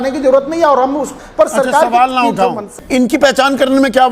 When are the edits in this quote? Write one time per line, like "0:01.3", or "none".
0:01.1
0:02.7